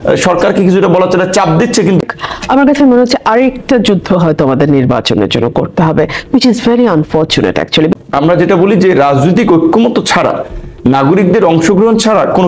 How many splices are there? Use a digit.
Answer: 2